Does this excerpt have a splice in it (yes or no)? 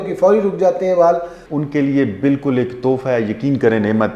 yes